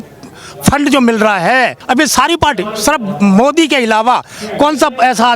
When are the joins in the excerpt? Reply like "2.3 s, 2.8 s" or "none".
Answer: 1.8 s